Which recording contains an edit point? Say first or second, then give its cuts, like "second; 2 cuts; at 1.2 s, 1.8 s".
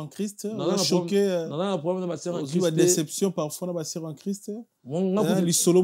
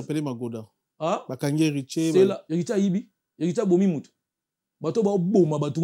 second; 1 cut; at 2.4 s